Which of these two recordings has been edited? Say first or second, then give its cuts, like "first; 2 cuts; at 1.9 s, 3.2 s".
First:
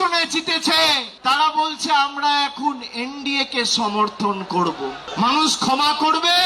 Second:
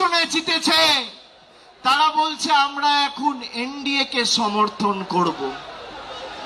first; 2 cuts; at 1.1 s, 5.0 s